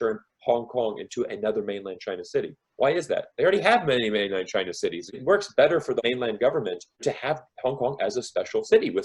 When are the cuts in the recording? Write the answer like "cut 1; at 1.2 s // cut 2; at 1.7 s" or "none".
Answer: none